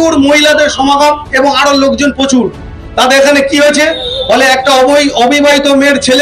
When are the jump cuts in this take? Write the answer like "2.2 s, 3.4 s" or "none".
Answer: none